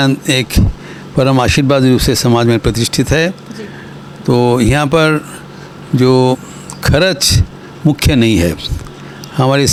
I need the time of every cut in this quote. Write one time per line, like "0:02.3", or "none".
none